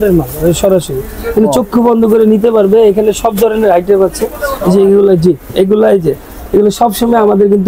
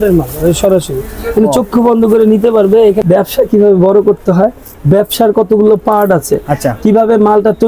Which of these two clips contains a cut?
second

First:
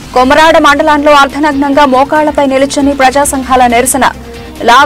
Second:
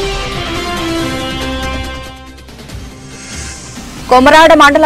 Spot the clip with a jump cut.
second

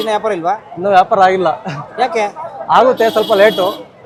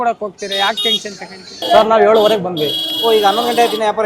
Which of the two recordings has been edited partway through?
second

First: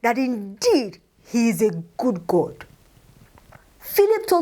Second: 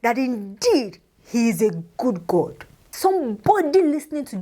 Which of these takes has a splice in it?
second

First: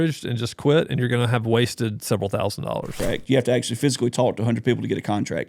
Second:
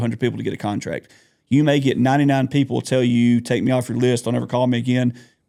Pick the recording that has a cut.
first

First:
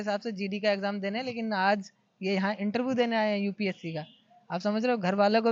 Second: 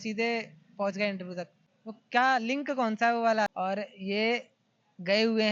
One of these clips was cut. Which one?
second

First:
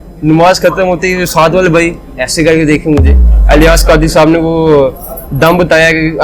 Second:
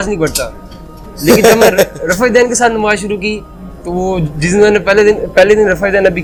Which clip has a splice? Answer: first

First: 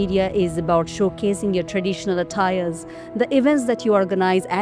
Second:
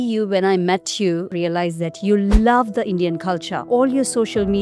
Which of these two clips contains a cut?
second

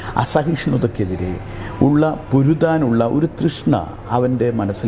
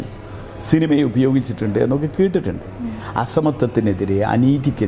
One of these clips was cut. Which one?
second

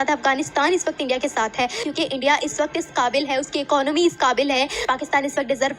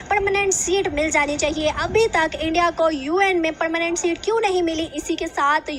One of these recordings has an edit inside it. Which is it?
first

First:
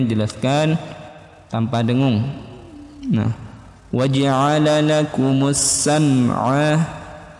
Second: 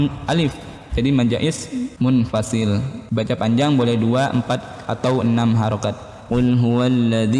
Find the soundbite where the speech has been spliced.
second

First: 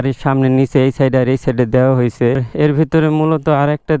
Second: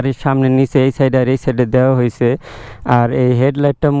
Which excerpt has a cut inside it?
first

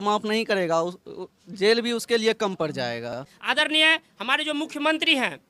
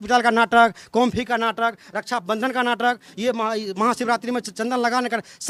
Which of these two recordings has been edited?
first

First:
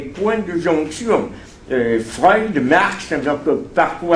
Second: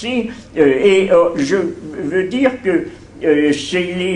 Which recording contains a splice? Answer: first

